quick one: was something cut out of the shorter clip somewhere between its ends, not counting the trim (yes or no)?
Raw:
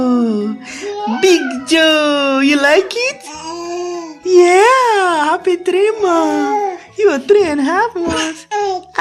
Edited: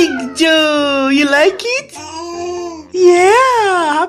no